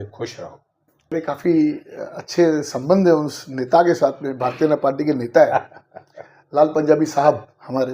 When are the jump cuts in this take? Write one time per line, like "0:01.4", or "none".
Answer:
0:01.1